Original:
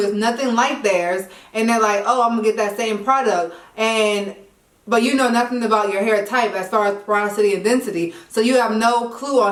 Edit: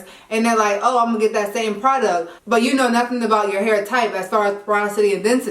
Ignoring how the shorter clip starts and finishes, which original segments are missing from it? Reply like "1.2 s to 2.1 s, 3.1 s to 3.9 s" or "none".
3.6 s to 4.7 s

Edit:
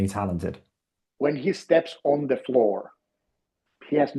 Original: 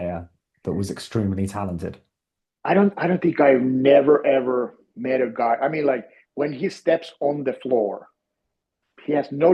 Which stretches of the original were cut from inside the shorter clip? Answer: 2.4 s to 6.2 s

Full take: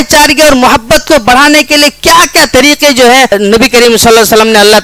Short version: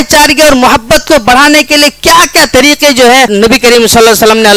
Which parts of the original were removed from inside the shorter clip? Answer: 3.3 s to 3.4 s

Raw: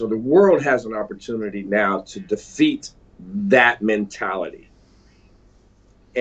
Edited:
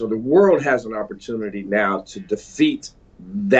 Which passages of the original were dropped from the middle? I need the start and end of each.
none

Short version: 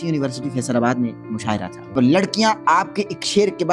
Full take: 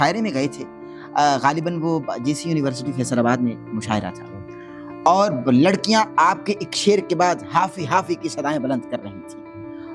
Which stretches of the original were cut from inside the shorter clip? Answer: 4.3 s to 5.4 s

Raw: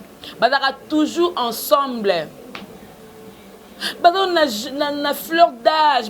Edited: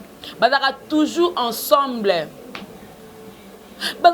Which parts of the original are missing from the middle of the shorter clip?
none

